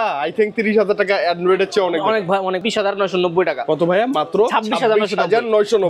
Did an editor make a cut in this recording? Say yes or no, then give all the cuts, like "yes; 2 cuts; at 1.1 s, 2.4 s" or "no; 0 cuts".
yes; 1 cut; at 2.6 s